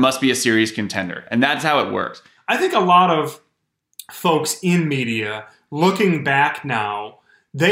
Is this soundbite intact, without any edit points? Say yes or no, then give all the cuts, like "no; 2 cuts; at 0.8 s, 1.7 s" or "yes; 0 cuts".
no; 1 cut; at 2.3 s